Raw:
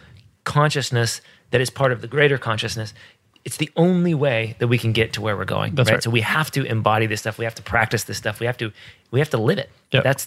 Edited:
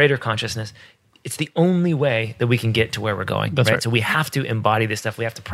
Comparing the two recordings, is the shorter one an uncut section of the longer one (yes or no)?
yes